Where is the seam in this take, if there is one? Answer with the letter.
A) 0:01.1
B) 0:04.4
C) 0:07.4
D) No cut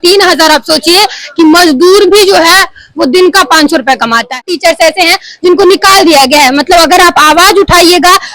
B